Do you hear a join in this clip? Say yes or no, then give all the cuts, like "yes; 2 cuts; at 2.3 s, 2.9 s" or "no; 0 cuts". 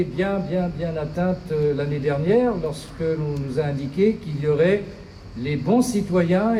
no; 0 cuts